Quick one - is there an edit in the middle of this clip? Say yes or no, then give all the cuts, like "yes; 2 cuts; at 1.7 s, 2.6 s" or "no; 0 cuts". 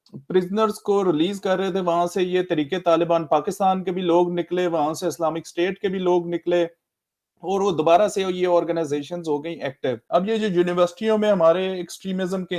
yes; 1 cut; at 10.0 s